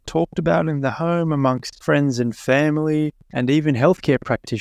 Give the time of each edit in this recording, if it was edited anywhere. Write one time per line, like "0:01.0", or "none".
0:01.7
0:03.2